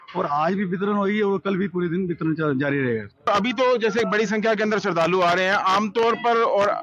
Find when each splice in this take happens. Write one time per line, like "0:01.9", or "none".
0:03.3

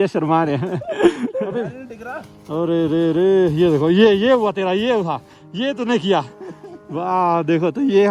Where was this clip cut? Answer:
0:01.5

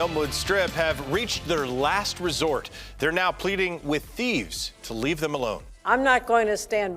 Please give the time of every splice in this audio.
none

